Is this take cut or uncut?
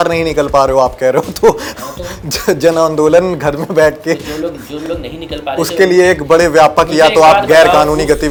uncut